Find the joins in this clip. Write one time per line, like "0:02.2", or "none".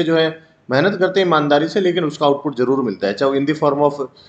none